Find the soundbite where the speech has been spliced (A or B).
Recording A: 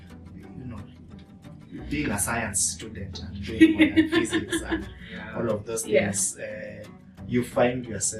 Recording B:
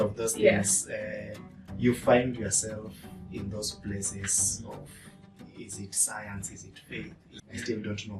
B